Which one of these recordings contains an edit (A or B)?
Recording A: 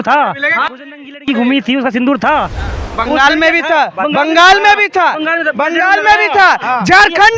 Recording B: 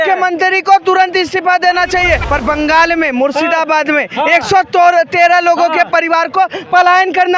B